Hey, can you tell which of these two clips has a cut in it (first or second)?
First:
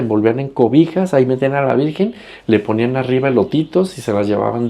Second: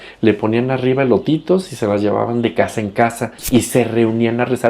second